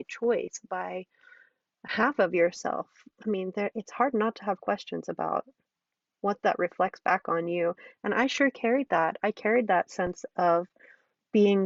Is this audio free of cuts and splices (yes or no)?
yes